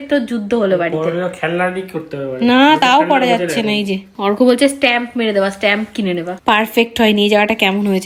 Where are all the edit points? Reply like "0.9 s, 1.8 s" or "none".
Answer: none